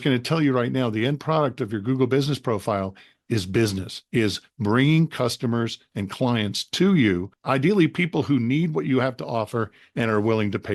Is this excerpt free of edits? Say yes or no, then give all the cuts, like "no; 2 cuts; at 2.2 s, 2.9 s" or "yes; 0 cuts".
no; 2 cuts; at 3.9 s, 7.3 s